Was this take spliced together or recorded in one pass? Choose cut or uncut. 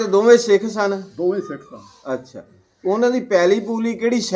uncut